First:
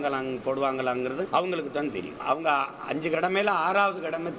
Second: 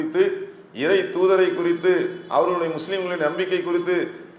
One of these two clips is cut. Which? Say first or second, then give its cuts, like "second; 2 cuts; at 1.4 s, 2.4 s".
first; 2 cuts; at 1.3 s, 2.1 s